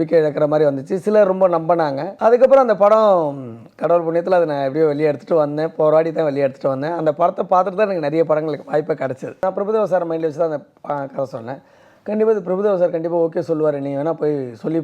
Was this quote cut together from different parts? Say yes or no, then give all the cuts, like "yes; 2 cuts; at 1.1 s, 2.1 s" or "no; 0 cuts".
yes; 2 cuts; at 2.1 s, 9.4 s